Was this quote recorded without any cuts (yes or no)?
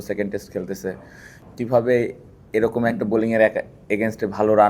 no